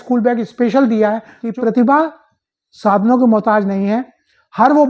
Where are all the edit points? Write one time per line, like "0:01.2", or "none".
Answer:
0:01.4

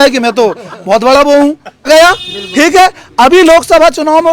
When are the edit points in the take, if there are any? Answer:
0:01.9

